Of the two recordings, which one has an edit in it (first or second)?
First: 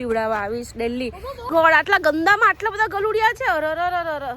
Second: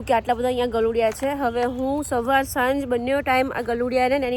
first